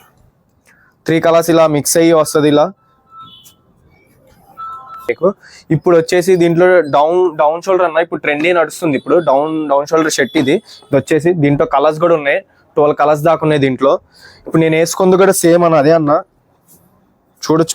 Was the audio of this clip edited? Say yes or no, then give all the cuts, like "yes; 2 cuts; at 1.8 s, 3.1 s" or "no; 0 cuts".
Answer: yes; 1 cut; at 5.0 s